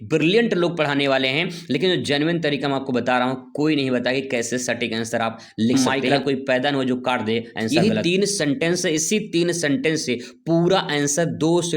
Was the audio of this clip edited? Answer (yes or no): yes